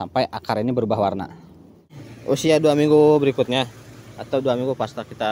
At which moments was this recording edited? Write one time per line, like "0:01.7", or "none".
0:02.1

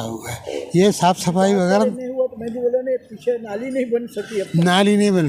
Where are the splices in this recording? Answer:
none

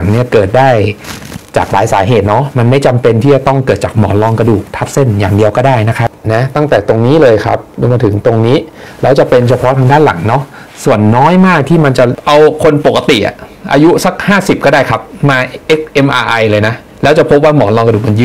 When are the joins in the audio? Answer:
0:06.2
0:12.2

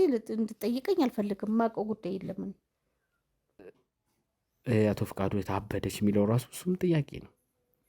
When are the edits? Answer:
0:03.6

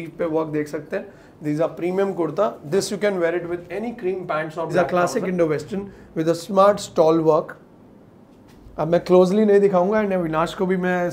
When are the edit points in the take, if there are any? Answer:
0:04.7

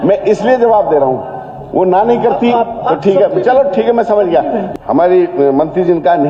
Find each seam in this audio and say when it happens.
0:04.7

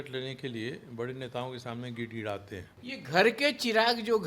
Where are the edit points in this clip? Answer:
0:02.7

